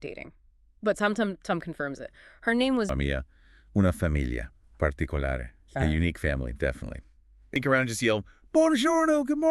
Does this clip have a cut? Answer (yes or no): yes